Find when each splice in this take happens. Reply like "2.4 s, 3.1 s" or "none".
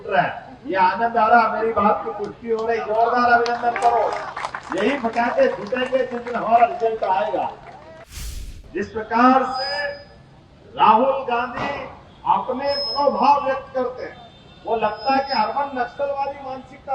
8.0 s